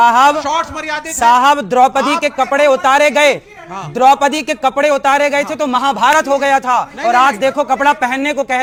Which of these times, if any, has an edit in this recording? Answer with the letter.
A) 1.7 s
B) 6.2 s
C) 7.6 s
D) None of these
D